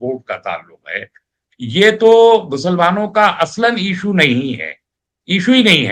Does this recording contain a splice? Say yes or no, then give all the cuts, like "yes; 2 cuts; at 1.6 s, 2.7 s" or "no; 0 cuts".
no; 0 cuts